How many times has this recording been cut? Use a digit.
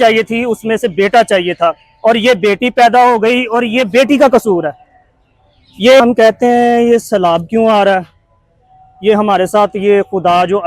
1